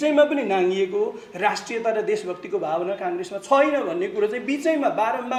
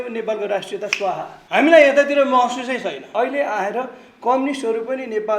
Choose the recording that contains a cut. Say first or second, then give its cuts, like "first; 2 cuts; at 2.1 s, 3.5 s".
second; 2 cuts; at 1.3 s, 3.0 s